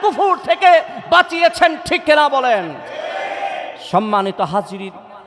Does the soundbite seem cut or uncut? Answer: uncut